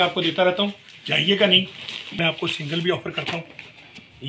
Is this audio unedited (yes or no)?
no